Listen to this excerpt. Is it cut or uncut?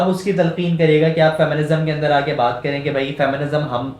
uncut